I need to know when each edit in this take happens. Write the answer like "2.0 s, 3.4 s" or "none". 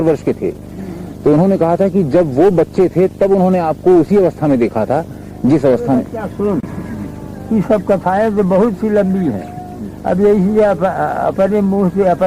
none